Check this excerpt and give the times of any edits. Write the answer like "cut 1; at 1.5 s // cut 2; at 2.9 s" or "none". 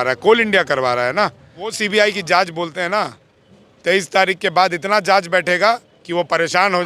cut 1; at 1.8 s